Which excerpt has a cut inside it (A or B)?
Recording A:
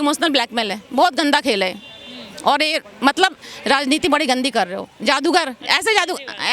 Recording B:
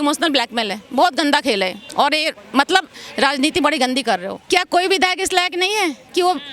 B